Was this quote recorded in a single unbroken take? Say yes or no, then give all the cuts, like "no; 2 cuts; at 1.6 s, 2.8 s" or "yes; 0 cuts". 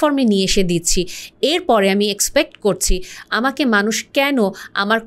yes; 0 cuts